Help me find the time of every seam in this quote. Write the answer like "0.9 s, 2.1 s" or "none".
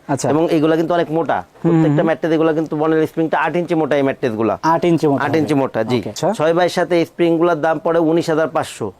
6.1 s